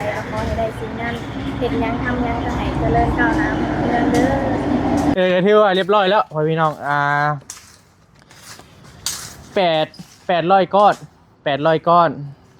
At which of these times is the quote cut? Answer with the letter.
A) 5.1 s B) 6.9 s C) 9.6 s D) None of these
A